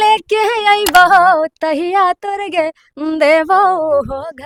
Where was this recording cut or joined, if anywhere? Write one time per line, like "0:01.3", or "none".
none